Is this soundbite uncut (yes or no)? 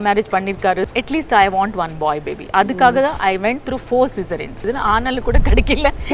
no